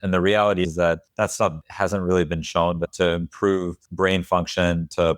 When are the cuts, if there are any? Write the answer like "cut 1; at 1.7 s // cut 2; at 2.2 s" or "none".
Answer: cut 1; at 1.4 s // cut 2; at 3.8 s